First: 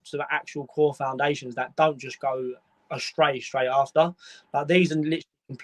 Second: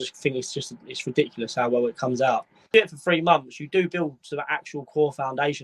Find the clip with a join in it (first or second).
second